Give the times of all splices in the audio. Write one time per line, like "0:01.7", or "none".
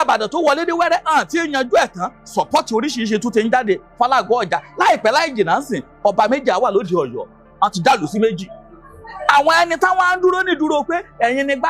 0:07.4

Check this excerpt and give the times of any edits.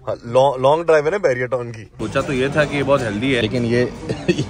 0:02.0
0:03.4

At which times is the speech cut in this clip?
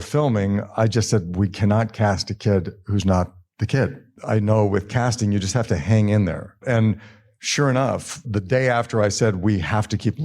0:04.1
0:06.6
0:08.2

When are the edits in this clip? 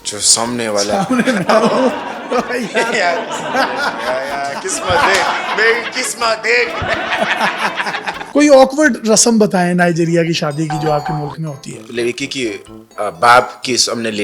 0:08.2

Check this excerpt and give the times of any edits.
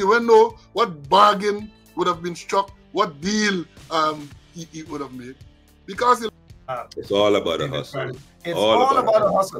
0:06.3

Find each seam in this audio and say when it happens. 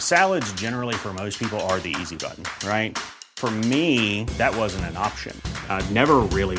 none

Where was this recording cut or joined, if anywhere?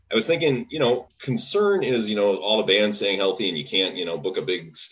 0:01.1

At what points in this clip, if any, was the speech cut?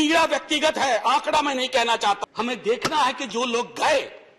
0:02.2

